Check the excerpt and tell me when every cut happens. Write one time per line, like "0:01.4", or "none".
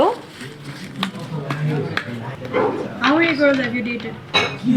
none